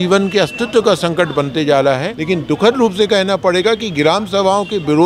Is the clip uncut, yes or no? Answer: no